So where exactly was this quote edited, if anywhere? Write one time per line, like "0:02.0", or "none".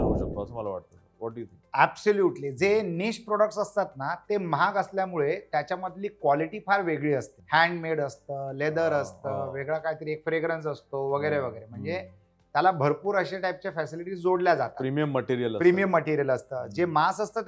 0:01.6
0:07.4